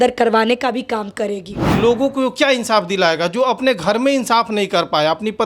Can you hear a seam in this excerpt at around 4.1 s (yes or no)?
no